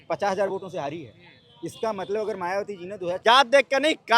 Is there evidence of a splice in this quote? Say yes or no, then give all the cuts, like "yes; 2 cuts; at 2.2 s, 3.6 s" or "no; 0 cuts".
yes; 1 cut; at 3.2 s